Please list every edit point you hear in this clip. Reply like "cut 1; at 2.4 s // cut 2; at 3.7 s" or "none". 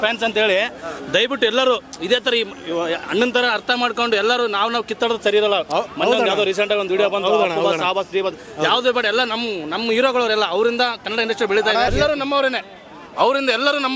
cut 1; at 11.9 s